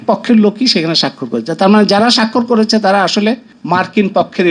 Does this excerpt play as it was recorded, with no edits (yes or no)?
no